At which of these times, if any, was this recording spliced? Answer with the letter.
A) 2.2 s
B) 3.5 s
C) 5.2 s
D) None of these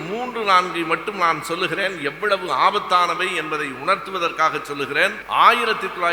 C